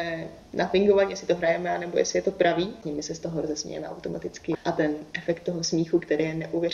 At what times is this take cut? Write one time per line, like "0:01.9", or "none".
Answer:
0:02.8
0:04.5